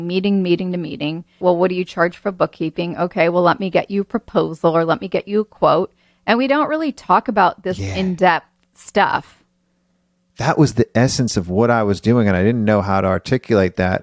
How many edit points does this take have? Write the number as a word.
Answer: one